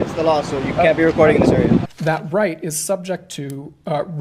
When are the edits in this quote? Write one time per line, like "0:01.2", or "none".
0:01.9